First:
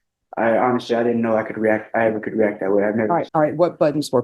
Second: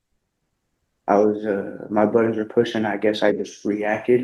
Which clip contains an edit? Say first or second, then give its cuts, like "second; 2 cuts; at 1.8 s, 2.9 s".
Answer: first; 1 cut; at 3.3 s